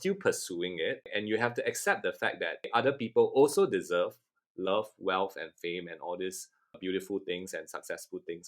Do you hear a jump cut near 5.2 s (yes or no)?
no